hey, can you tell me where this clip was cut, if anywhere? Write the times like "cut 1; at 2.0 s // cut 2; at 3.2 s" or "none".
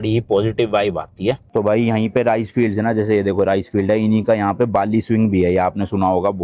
cut 1; at 1.5 s